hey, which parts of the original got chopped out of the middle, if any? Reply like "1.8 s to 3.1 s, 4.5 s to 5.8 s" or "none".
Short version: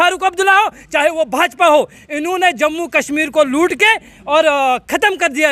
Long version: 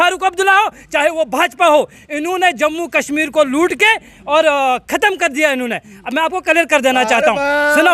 none